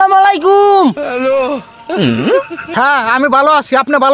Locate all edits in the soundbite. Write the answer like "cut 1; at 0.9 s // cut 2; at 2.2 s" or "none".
none